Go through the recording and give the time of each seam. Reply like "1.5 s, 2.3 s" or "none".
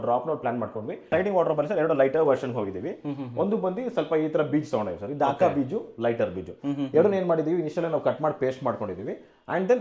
1.0 s